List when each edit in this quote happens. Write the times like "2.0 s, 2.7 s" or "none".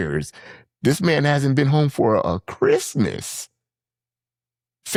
none